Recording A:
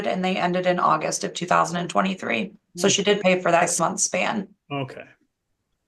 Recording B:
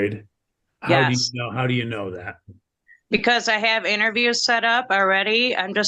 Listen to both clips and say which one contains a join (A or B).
A